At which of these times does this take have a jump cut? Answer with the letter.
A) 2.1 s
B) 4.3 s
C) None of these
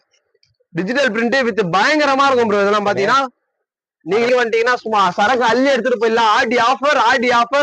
B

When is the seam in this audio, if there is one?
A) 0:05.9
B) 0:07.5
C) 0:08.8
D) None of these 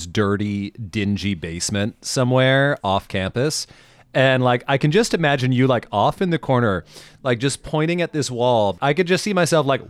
C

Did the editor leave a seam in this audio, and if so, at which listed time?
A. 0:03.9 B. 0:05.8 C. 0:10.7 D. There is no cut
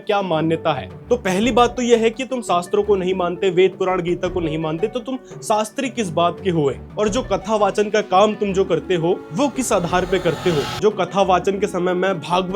C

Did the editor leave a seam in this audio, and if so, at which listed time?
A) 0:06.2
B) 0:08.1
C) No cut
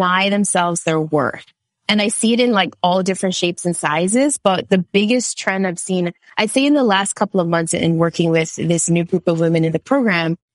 C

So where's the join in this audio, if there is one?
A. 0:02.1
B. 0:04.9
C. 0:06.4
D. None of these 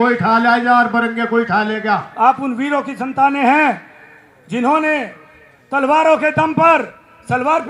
A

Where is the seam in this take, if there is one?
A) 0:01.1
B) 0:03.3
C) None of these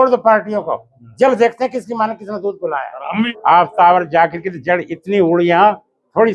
B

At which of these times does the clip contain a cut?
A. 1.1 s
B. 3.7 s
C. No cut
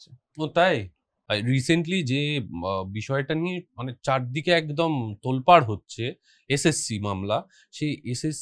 A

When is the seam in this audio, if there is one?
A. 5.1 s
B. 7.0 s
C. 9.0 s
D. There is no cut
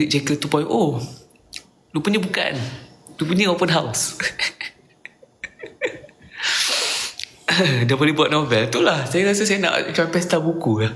D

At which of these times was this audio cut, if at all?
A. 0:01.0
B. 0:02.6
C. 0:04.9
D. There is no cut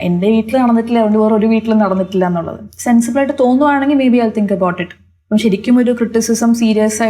B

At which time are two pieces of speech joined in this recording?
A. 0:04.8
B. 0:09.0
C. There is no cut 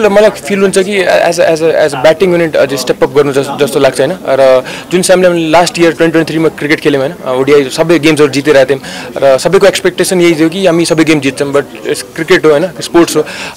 C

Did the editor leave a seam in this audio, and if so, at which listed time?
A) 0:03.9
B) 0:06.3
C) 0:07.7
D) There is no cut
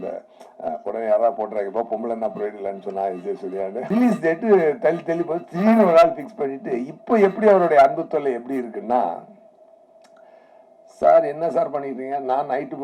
A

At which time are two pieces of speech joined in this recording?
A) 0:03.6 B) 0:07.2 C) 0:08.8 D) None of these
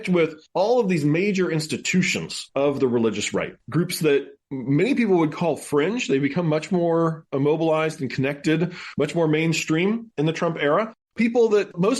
A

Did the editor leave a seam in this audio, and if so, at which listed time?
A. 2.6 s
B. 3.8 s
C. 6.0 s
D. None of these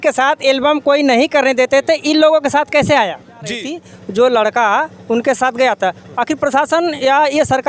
B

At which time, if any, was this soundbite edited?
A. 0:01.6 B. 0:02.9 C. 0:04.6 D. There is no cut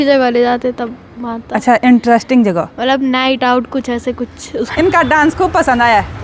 C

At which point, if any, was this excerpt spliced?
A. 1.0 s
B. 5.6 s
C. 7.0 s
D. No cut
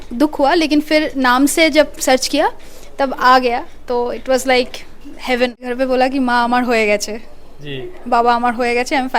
B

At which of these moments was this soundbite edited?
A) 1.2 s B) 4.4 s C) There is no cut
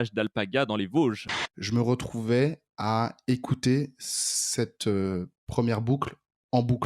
A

